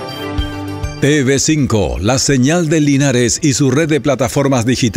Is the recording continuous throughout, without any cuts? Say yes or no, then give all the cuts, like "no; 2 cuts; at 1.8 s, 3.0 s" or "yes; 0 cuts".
no; 1 cut; at 1.0 s